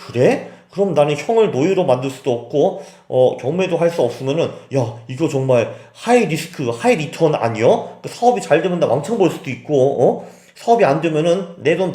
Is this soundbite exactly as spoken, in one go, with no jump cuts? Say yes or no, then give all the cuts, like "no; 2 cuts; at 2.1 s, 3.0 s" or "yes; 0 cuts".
yes; 0 cuts